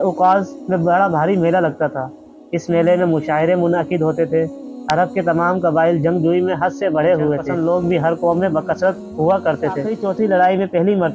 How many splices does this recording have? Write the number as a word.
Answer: two